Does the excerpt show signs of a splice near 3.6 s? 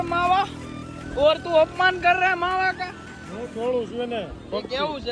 no; 0 cuts

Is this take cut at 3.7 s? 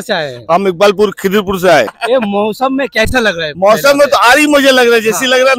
no; 1 cut; at 2.0 s

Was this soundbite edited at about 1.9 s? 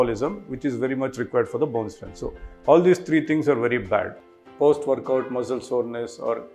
no; 1 cut; at 4.2 s

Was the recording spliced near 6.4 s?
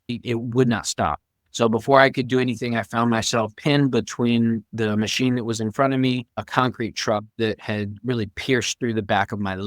yes; 1 cut; at 6.4 s

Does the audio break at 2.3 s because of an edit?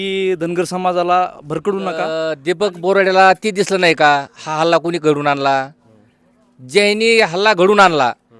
yes; 1 cut; at 2.3 s

